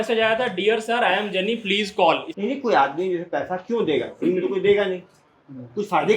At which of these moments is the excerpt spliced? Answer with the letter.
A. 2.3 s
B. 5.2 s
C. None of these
A